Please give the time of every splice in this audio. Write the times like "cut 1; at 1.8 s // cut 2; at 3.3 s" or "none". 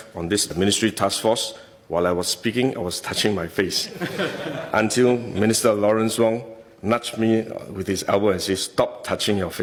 none